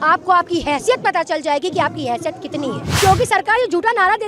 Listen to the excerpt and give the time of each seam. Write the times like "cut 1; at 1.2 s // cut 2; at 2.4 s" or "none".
cut 1; at 3.0 s